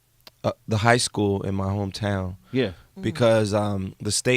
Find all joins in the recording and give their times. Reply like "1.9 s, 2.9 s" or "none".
2.8 s